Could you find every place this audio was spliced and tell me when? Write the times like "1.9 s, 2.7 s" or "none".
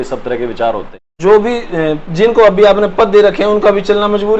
1.1 s